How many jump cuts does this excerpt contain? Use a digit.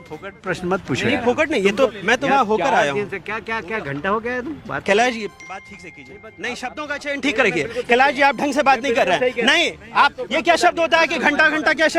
0